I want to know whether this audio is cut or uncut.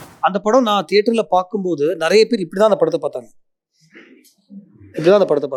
uncut